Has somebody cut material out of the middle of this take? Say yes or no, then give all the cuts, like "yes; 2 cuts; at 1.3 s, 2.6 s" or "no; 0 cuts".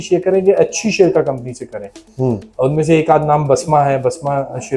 no; 0 cuts